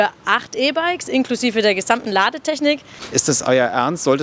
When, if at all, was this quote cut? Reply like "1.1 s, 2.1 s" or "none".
2.9 s